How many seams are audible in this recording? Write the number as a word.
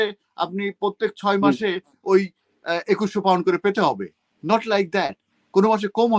zero